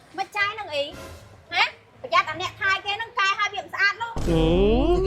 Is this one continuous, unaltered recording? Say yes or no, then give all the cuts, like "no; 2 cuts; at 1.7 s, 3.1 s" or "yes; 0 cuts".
no; 1 cut; at 1.9 s